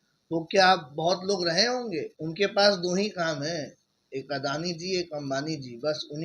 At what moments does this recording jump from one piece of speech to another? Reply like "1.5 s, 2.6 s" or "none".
2.2 s